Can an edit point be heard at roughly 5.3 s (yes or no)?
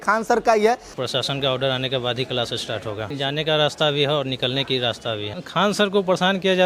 yes